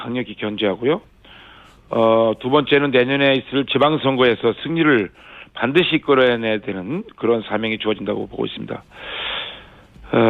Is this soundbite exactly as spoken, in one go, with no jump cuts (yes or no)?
no